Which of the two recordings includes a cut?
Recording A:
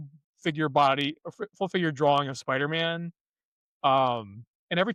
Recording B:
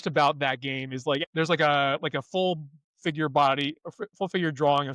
B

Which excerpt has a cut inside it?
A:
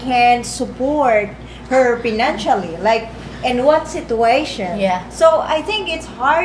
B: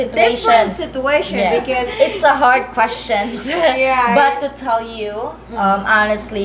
B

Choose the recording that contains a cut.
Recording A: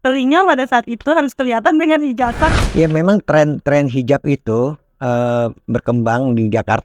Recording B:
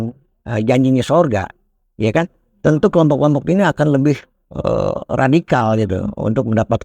A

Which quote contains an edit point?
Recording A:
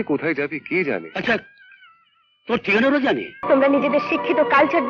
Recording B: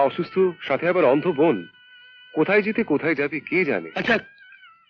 A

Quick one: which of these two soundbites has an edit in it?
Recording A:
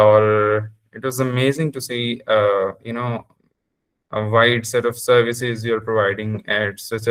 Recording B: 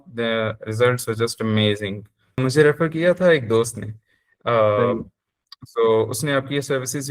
B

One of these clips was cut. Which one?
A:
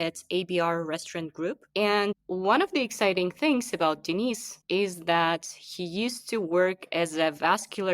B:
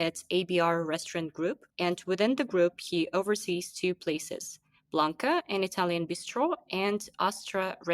A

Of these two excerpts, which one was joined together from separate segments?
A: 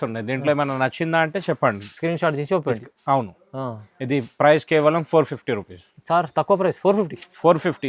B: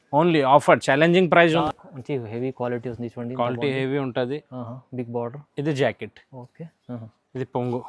B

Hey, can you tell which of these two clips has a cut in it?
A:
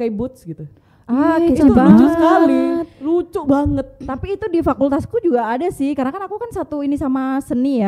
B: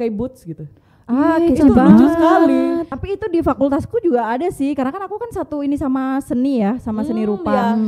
B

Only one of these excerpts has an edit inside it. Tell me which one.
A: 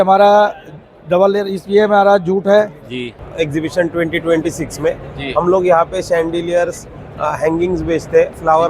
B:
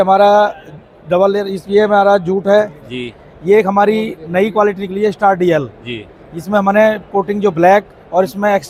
A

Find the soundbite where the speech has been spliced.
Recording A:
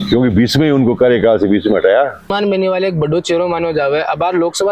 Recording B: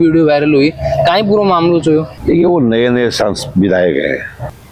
A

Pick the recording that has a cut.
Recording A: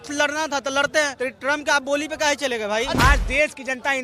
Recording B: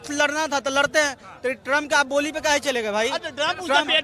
A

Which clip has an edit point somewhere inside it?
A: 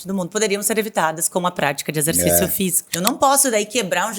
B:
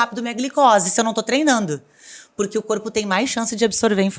A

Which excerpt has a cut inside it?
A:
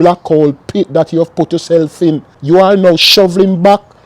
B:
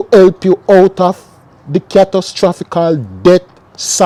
A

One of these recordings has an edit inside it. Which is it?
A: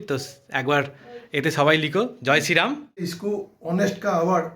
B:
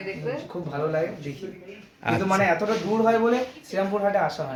A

